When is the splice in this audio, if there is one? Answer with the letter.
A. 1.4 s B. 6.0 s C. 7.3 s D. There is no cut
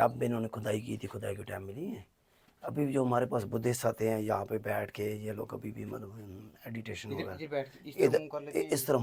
D